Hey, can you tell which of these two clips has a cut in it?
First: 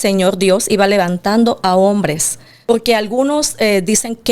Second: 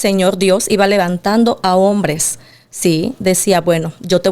first; 1 cut; at 2.7 s

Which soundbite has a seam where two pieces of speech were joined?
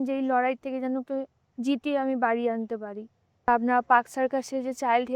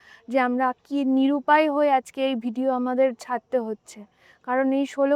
first; 1 cut; at 3.5 s

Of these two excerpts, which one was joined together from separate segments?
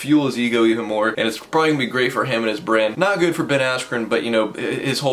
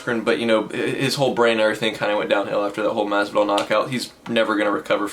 first; 2 cuts; at 1.1 s, 2.9 s

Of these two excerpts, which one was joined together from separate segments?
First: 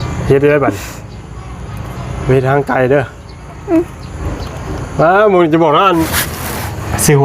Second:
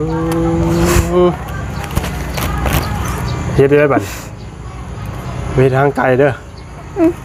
first; 1 cut; at 6.2 s

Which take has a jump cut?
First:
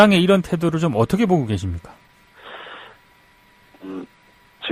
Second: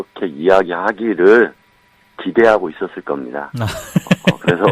second; 1 cut; at 2.7 s

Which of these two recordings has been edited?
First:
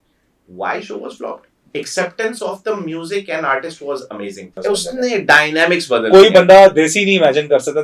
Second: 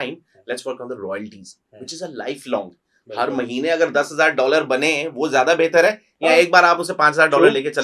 first; 1 cut; at 4.5 s

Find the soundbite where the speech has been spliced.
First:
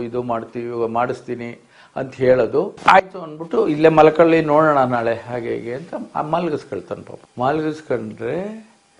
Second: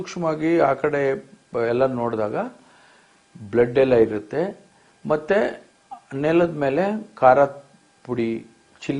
first; 1 cut; at 2.7 s

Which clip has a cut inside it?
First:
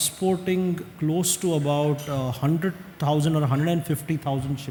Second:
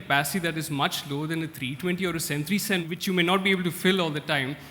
second; 1 cut; at 2.8 s

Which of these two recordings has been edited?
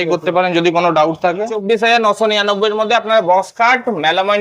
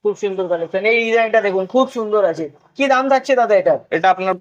first; 1 cut; at 1.5 s

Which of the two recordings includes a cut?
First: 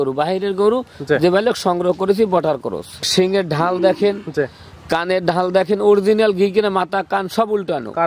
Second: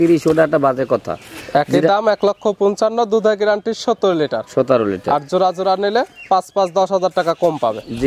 first; 1 cut; at 3.0 s

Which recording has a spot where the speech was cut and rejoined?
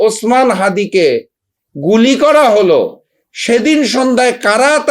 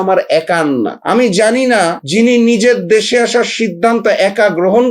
second; 2 cuts; at 1.0 s, 2.0 s

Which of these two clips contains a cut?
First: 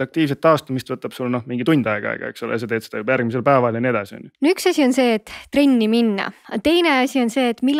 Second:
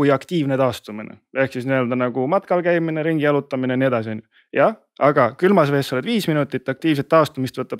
first; 1 cut; at 4.2 s

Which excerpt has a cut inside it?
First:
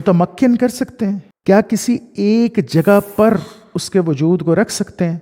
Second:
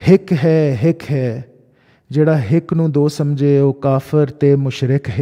first; 1 cut; at 1.3 s

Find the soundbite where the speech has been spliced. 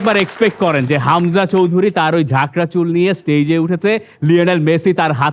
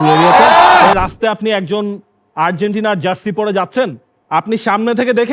second; 1 cut; at 0.9 s

